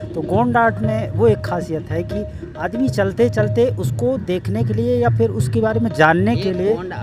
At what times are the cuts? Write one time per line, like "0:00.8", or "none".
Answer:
none